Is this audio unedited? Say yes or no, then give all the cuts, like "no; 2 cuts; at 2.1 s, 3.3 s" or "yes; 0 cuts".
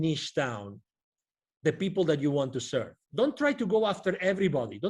no; 1 cut; at 3.0 s